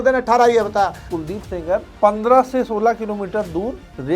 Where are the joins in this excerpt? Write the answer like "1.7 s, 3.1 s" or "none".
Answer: 1.1 s

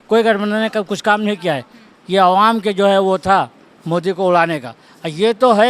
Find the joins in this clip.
none

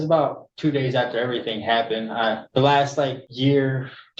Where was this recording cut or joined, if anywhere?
2.4 s, 3.2 s

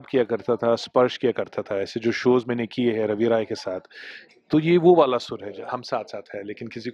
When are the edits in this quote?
5.4 s

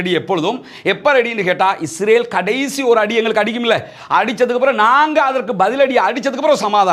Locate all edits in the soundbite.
none

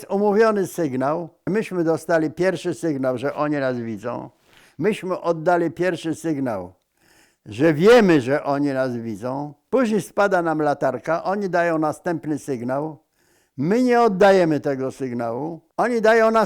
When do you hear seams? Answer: 1.5 s, 9.5 s

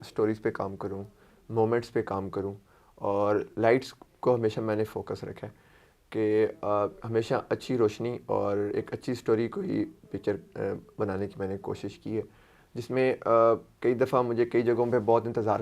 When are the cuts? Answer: none

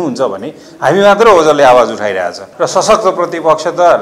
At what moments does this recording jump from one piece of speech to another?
2.4 s

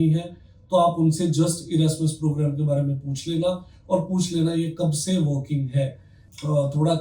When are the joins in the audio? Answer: none

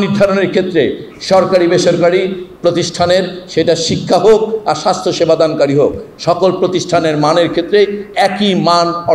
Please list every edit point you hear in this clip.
none

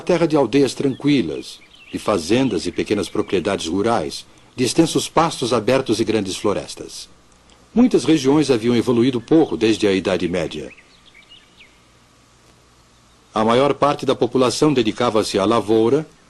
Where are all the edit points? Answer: none

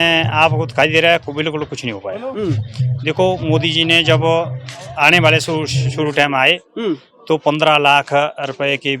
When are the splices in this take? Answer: none

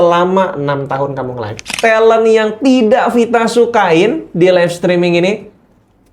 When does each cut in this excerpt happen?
1.7 s

